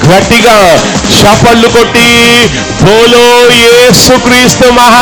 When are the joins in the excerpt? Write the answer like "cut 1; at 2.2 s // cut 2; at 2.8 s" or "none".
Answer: none